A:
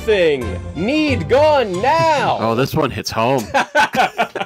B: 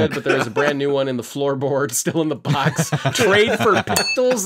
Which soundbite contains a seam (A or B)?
A